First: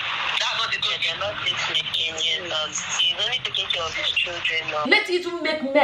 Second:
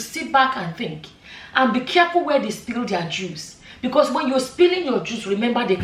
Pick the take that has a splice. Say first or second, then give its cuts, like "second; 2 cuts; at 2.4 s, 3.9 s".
first; 1 cut; at 4.8 s